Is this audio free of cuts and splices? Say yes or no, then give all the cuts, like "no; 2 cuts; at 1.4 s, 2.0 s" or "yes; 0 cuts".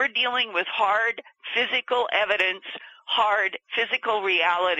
yes; 0 cuts